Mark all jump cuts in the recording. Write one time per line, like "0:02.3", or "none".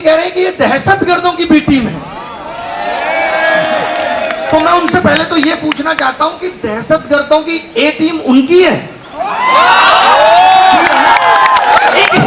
none